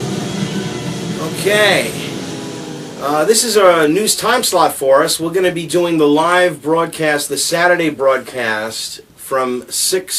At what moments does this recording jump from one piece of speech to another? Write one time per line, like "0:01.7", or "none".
0:07.9